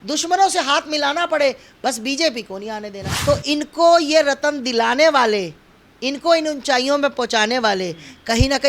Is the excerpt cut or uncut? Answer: cut